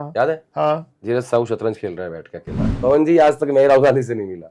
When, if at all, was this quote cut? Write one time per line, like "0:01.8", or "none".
0:00.9
0:02.7